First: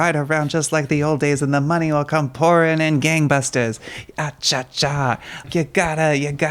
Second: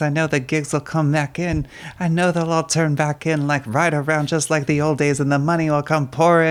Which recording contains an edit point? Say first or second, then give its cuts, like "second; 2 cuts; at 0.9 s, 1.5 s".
first; 1 cut; at 5.5 s